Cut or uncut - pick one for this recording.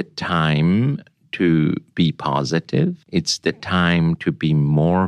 cut